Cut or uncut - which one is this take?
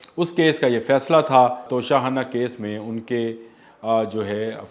cut